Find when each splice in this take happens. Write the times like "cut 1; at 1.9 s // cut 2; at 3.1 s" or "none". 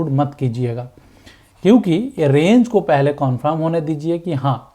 none